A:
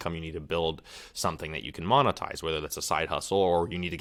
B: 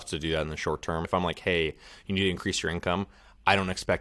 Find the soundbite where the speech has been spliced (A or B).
B